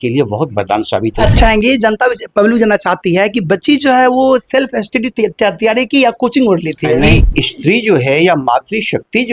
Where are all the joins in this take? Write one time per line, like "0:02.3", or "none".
0:01.3
0:07.2